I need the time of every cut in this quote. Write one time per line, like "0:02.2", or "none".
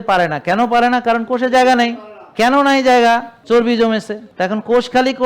0:02.3
0:03.3
0:04.3